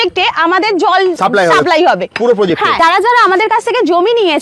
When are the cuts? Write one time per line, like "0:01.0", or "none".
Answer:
0:01.2
0:02.8